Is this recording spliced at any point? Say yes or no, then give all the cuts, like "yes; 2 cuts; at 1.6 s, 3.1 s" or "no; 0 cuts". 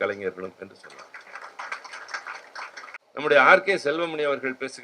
yes; 1 cut; at 3.0 s